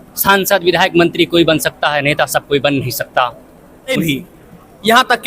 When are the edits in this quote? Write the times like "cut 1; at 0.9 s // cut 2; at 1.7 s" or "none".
cut 1; at 4.0 s